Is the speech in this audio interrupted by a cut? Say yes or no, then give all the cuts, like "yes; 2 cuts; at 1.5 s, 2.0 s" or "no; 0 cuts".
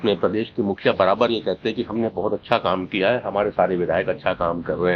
no; 0 cuts